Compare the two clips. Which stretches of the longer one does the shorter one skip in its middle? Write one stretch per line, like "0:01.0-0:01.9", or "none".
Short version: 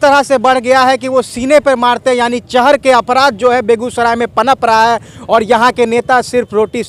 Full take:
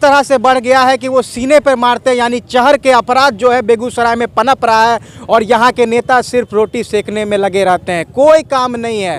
none